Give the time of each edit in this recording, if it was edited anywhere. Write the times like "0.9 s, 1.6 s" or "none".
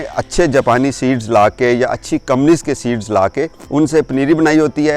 3.6 s

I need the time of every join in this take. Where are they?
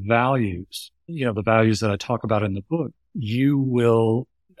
3.1 s

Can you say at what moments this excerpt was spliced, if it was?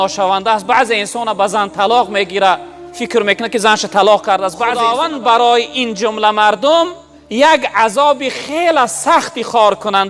4.8 s

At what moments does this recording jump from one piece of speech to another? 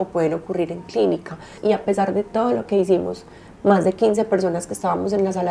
1.6 s

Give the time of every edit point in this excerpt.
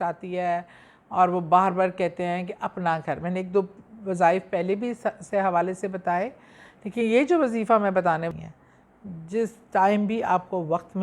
8.3 s

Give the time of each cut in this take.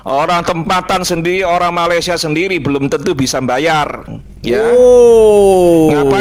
none

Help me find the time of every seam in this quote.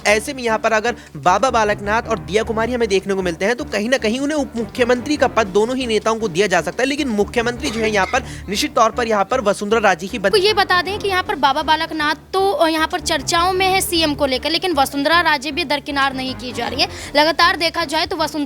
10.3 s

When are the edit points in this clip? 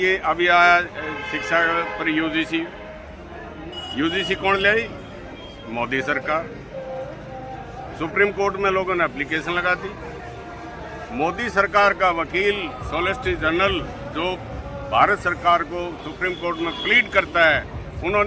none

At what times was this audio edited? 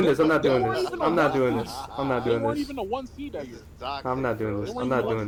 none

